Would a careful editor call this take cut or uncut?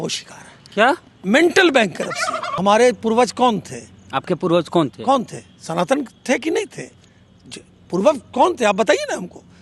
cut